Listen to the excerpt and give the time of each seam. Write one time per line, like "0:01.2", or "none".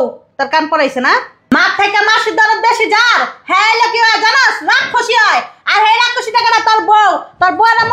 0:01.5